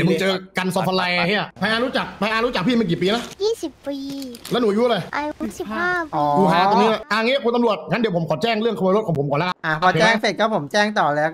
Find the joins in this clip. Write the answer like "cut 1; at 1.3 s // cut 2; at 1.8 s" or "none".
cut 1; at 1.5 s // cut 2; at 3.3 s // cut 3; at 5.1 s // cut 4; at 7.1 s // cut 5; at 9.6 s

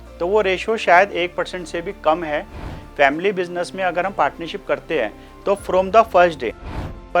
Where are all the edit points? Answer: cut 1; at 2.8 s

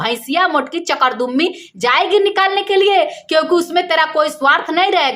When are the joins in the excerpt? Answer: none

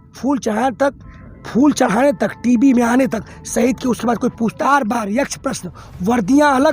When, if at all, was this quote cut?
cut 1; at 4.6 s

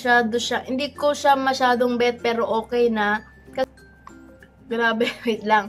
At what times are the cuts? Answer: cut 1; at 3.6 s

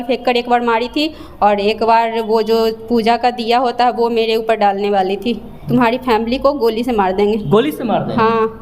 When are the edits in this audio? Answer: cut 1; at 5.5 s

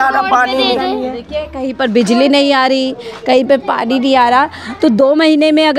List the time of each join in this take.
none

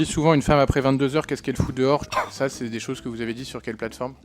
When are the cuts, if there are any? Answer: cut 1; at 2.1 s

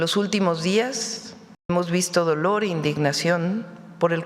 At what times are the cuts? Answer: cut 1; at 1.7 s

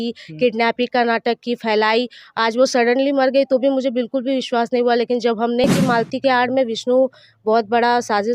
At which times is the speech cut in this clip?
cut 1; at 5.6 s

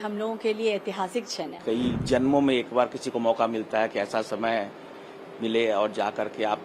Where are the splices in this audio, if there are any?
cut 1; at 1.6 s

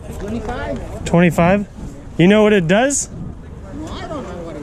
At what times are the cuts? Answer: none

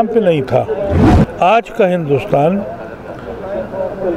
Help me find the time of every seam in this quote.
cut 1; at 1.0 s

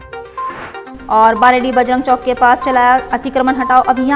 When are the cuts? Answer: cut 1; at 0.9 s

